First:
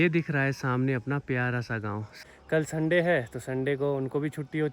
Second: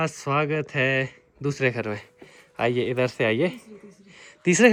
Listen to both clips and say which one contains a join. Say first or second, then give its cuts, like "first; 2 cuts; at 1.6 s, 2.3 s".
first; 1 cut; at 2.2 s